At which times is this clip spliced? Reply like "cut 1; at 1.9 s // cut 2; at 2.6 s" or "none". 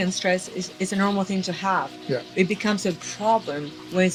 none

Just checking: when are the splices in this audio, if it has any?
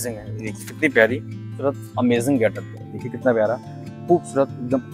cut 1; at 1.6 s

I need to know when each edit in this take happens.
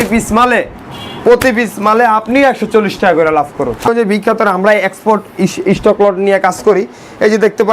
cut 1; at 3.9 s

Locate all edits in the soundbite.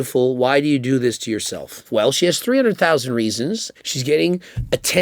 cut 1; at 1.7 s // cut 2; at 3.7 s

